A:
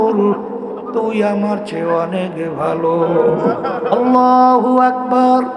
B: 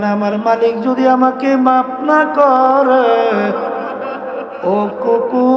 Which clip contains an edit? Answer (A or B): A